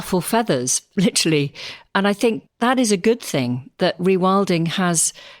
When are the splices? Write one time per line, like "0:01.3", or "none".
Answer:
0:02.4